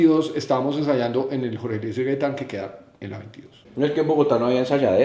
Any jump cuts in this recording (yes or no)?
yes